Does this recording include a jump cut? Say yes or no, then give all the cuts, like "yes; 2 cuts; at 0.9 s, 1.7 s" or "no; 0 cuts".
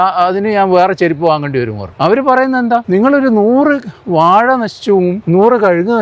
yes; 3 cuts; at 1.8 s, 2.8 s, 5.2 s